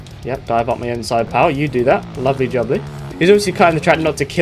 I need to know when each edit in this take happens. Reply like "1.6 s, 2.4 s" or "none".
3.0 s